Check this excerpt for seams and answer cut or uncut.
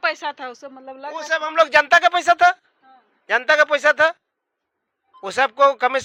uncut